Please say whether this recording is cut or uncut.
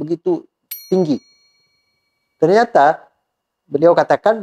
uncut